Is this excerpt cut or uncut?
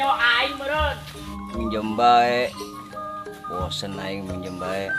cut